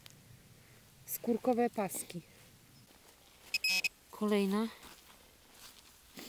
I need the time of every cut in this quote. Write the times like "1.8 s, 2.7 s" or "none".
2.9 s